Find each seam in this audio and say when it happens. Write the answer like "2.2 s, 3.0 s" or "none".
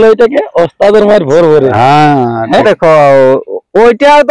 2.6 s